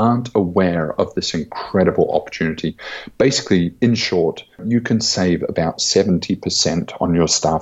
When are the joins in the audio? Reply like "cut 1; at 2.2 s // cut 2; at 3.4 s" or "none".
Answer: cut 1; at 4.6 s